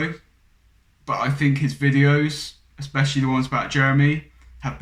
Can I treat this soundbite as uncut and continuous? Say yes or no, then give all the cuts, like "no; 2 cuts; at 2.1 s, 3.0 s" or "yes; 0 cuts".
yes; 0 cuts